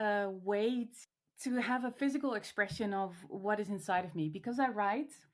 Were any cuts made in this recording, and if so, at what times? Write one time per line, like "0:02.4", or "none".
0:01.0